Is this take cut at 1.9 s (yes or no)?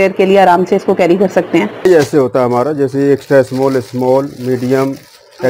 yes